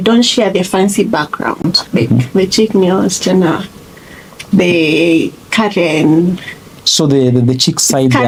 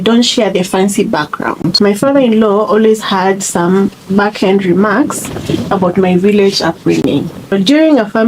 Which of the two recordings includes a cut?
second; 3 cuts; at 1.7 s, 4.0 s, 7.5 s

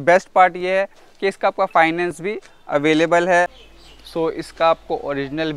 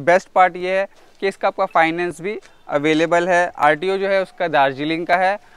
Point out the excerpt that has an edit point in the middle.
first; 1 cut; at 3.5 s

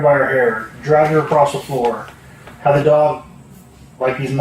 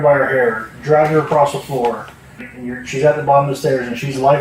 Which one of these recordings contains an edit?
second; 1 cut; at 2.4 s

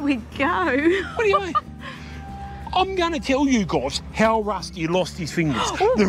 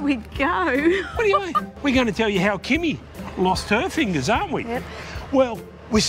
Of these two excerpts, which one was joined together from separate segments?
second; 1 cut; at 1.6 s

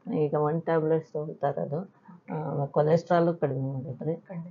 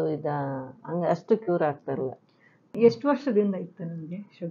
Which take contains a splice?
second; 1 cut; at 2.8 s

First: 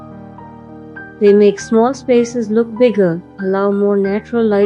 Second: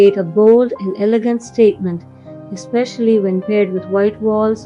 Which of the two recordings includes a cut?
first; 1 cut; at 1.2 s

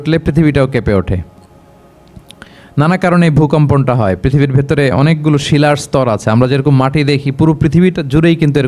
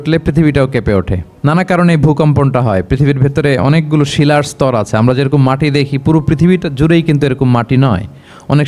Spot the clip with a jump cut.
second; 1 cut; at 1.2 s

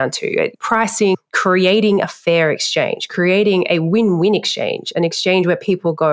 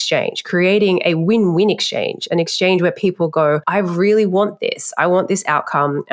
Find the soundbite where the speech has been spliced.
first; 1 cut; at 1.1 s

